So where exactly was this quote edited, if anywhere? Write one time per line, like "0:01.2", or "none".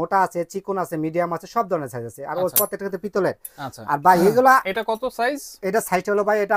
none